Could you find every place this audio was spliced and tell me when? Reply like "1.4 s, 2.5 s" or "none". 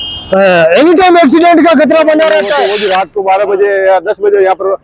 2.7 s